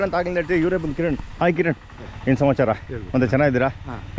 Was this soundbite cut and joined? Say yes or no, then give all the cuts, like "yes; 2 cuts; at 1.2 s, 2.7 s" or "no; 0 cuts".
no; 0 cuts